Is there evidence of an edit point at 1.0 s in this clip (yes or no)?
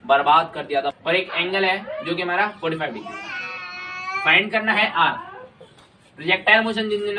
yes